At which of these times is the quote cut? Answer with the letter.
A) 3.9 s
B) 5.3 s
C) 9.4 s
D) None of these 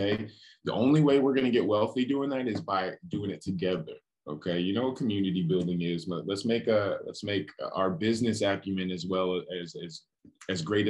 D